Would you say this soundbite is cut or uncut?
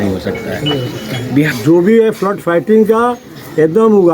cut